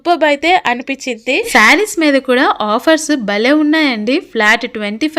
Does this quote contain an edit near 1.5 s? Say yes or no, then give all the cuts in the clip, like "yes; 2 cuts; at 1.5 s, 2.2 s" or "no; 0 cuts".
yes; 1 cut; at 1.5 s